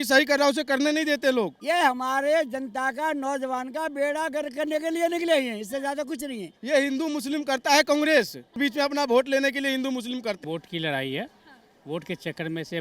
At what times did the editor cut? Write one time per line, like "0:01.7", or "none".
0:01.6
0:06.5
0:08.6
0:10.4

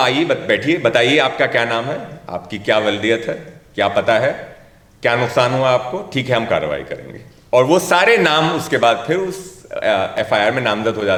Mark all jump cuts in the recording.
none

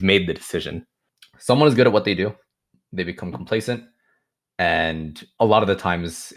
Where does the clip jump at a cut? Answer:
0:01.1

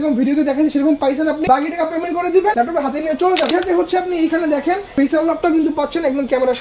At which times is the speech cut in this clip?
0:01.5
0:02.5
0:03.5
0:04.9

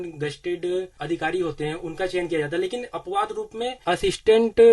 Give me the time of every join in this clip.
0:01.0
0:03.8

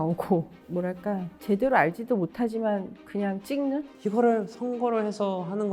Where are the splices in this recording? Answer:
0:03.9

